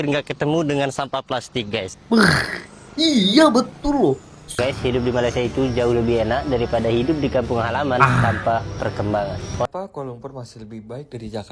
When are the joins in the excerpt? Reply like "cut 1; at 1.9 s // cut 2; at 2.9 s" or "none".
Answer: cut 1; at 4.6 s // cut 2; at 9.7 s